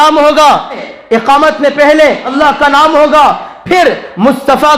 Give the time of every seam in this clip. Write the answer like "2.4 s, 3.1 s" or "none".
0.9 s, 2.3 s